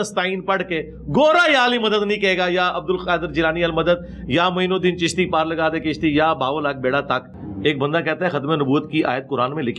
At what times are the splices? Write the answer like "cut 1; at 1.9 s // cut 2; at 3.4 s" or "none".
cut 1; at 7.4 s